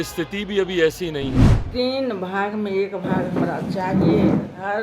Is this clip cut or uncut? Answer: cut